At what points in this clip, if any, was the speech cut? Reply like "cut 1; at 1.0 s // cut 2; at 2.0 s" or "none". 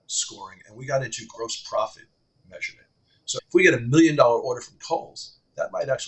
cut 1; at 3.4 s